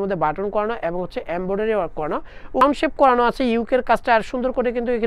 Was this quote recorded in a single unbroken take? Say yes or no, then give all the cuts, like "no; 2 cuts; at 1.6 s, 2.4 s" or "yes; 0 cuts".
no; 1 cut; at 2.6 s